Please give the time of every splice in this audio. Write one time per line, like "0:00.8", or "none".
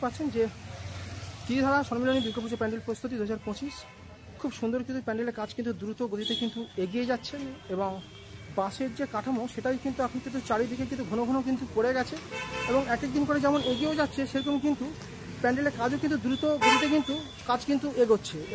none